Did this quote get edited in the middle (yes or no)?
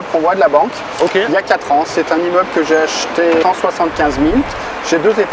yes